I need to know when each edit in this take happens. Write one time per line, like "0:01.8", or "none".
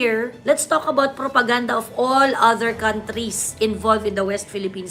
none